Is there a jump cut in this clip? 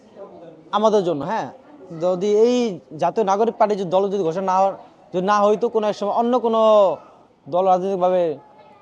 no; 0 cuts

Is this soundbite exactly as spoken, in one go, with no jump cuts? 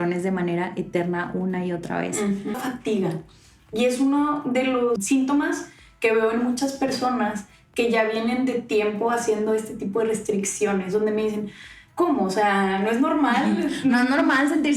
no; 2 cuts; at 2.6 s, 5.0 s

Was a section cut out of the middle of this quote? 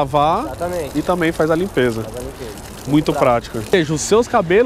yes; 1 cut; at 3.7 s

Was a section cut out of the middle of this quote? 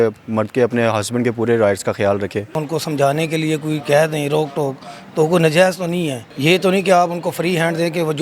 yes; 2 cuts; at 2.6 s, 6.2 s

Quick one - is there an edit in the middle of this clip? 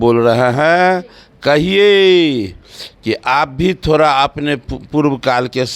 no; 0 cuts

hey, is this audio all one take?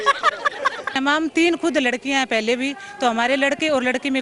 no; 1 cut; at 1.0 s

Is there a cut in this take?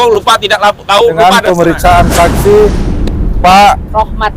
yes; 1 cut; at 1.1 s

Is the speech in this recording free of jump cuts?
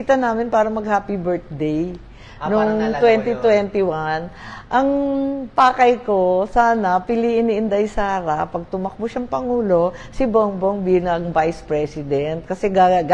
yes; 0 cuts

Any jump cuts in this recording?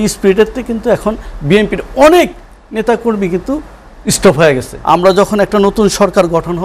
yes; 1 cut; at 4.7 s

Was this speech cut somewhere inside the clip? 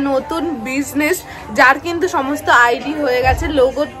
no; 0 cuts

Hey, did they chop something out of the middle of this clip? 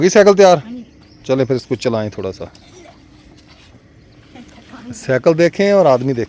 yes; 1 cut; at 3.5 s

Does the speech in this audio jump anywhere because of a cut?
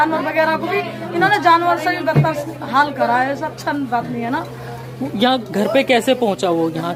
no; 0 cuts

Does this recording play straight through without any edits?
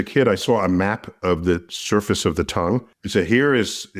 no; 1 cut; at 2.8 s

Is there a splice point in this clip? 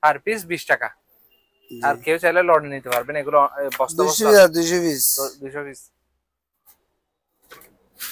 no; 0 cuts

